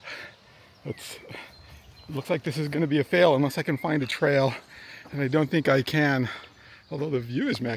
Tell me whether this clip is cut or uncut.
uncut